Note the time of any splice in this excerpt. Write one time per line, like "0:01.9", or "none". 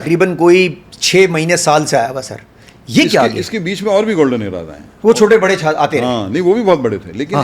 none

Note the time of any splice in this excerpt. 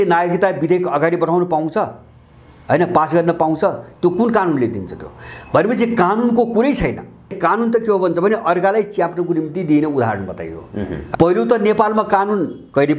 0:07.4
0:11.1

